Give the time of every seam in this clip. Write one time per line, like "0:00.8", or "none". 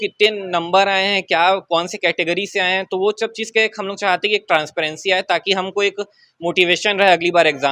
none